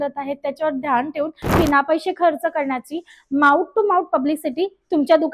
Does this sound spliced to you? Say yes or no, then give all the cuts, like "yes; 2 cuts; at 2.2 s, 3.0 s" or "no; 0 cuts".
yes; 1 cut; at 1.5 s